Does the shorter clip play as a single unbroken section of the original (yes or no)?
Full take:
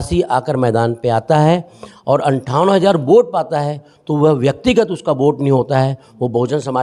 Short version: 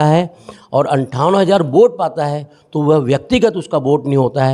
yes